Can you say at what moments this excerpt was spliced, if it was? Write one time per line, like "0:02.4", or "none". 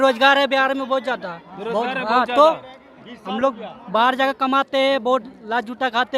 none